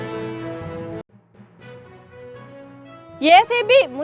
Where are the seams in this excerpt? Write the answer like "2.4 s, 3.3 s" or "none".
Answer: 0.9 s